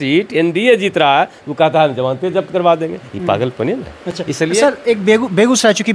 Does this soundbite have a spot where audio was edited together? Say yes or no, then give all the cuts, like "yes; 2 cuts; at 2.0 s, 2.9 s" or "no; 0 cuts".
no; 0 cuts